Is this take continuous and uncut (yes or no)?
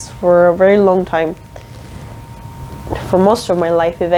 yes